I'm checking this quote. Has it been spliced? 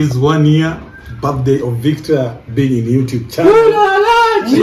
no; 0 cuts

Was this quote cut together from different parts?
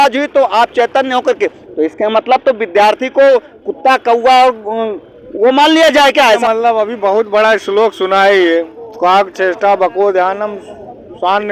yes; 1 cut; at 6.4 s

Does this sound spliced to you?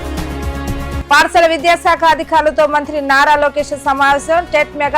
no; 0 cuts

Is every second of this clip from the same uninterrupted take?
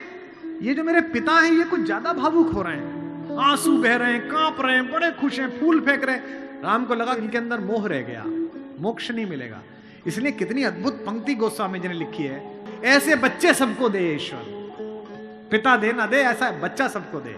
no; 1 cut; at 12.6 s

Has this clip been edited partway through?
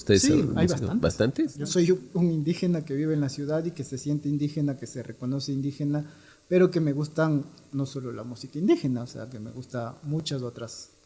yes; 1 cut; at 1.6 s

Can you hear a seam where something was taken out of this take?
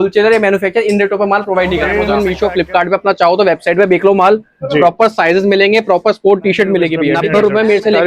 yes; 2 cuts; at 2.1 s, 7.2 s

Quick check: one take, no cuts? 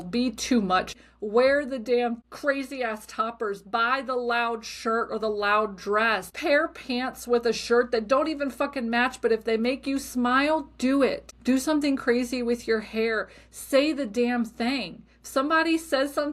no; 4 cuts; at 0.9 s, 2.3 s, 6.3 s, 11.3 s

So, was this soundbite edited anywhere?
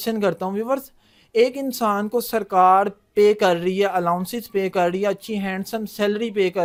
no; 0 cuts

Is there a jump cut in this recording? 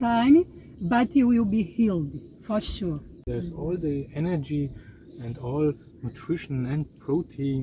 yes; 1 cut; at 3.3 s

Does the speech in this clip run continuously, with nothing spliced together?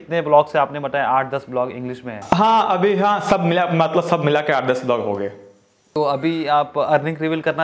yes; 0 cuts

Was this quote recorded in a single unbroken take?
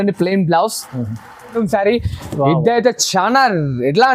no; 1 cut; at 1.6 s

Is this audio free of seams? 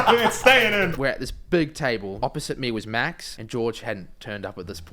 no; 3 cuts; at 0.9 s, 2.1 s, 3.3 s

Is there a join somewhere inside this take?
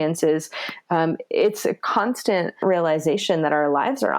yes; 1 cut; at 2.6 s

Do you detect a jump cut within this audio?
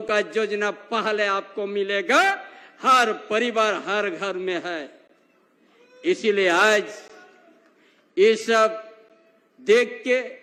no; 0 cuts

